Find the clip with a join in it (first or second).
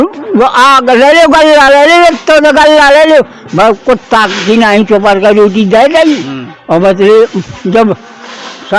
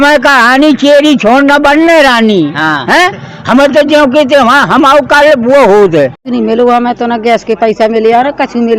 second